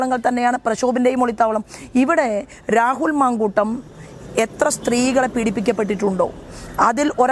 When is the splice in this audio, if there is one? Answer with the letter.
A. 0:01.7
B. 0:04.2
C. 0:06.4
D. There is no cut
D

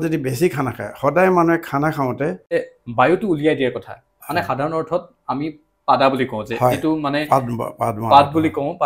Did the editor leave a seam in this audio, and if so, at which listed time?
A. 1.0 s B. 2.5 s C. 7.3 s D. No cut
B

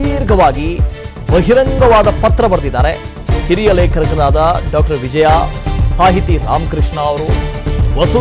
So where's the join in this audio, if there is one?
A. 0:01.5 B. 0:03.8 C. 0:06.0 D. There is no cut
A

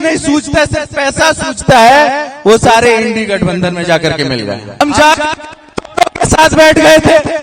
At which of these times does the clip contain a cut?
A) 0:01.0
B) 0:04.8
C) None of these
B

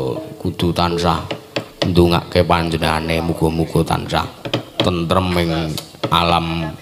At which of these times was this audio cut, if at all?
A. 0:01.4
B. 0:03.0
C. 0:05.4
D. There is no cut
D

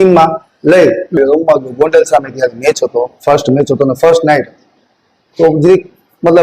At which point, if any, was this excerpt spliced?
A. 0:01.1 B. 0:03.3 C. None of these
A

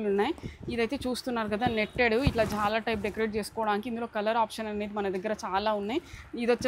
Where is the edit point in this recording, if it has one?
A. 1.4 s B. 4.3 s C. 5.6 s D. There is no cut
D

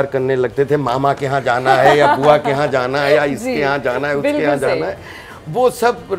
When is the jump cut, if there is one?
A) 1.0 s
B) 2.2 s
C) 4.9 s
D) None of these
D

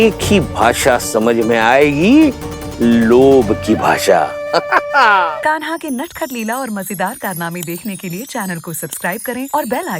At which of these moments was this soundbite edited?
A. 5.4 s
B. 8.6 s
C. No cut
A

